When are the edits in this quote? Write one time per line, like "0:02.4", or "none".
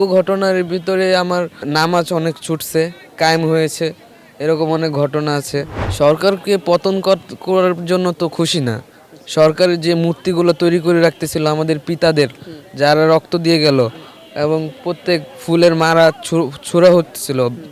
0:01.6
0:05.8